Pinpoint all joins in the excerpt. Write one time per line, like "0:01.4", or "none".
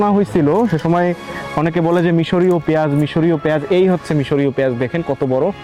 none